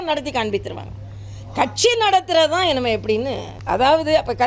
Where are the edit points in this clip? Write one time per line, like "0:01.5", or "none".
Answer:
0:03.5